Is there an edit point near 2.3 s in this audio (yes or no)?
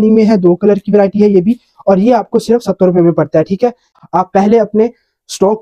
no